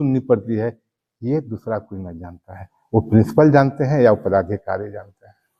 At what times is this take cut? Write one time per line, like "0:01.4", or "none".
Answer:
none